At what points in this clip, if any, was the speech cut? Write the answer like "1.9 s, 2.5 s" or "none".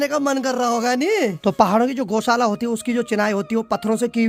1.4 s